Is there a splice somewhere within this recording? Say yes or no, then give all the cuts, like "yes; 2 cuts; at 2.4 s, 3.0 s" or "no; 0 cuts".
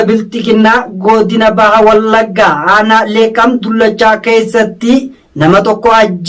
no; 0 cuts